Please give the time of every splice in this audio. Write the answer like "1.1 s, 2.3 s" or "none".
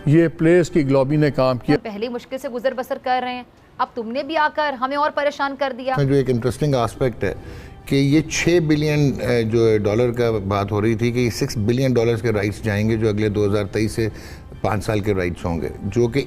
1.8 s, 6.0 s